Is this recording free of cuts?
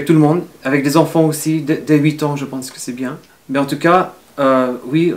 no; 1 cut; at 3.3 s

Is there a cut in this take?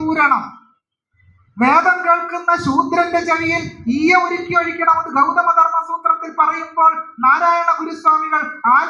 no; 0 cuts

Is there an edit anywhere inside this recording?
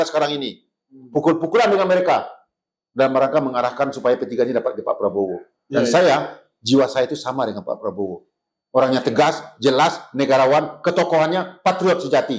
no; 0 cuts

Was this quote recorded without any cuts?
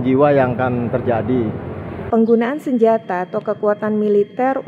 no; 1 cut; at 1.9 s

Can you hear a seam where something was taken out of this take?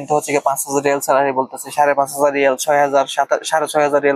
no; 0 cuts

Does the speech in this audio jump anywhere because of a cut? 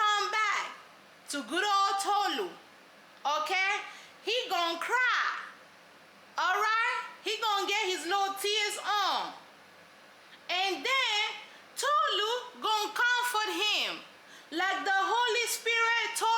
no; 0 cuts

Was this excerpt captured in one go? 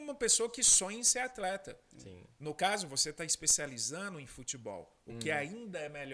yes; 0 cuts

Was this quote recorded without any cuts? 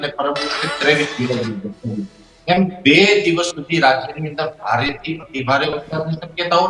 yes; 0 cuts

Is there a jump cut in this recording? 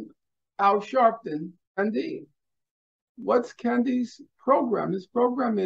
yes; 1 cut; at 1.8 s

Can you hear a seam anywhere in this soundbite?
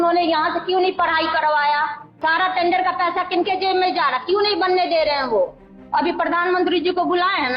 yes; 2 cuts; at 2.0 s, 5.8 s

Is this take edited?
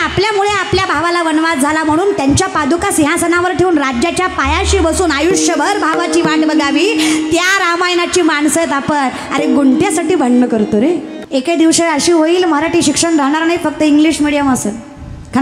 yes; 1 cut; at 11.1 s

